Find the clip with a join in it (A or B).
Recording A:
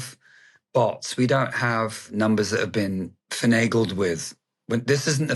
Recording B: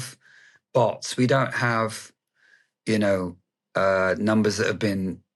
A